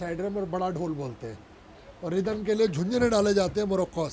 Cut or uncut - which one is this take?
uncut